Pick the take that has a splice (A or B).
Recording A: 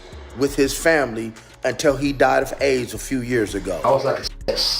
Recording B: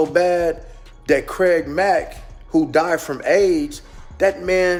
A